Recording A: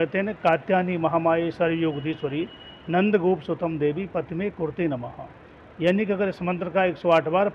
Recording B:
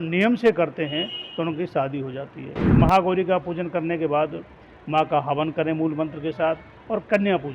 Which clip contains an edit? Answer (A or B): B